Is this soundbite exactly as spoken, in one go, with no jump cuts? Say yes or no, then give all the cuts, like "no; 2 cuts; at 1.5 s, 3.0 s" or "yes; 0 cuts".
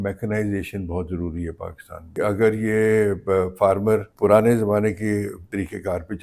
no; 3 cuts; at 2.1 s, 4.1 s, 5.4 s